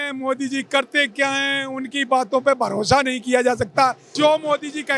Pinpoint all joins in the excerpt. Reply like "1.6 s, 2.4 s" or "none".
4.1 s